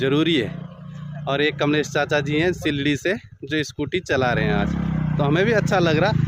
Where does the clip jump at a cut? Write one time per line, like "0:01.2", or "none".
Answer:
none